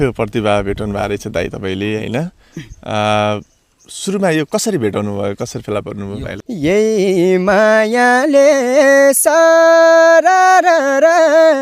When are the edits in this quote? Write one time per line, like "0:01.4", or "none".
0:06.3